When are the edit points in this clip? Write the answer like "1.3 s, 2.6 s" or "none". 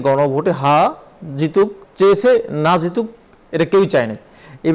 1.8 s